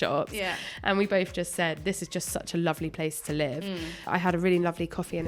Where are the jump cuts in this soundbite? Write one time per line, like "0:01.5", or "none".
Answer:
0:04.0